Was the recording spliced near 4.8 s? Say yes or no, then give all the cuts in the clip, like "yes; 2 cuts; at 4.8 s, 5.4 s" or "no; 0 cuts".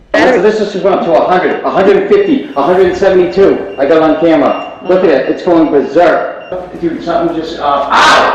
no; 1 cut; at 6.5 s